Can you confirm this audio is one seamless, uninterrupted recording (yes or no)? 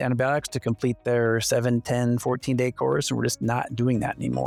yes